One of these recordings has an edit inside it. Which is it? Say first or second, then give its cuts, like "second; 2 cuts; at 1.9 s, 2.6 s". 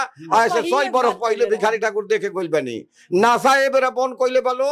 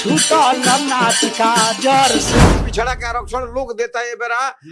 second; 1 cut; at 2.4 s